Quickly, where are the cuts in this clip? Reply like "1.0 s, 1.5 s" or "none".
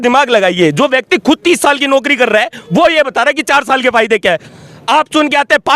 4.4 s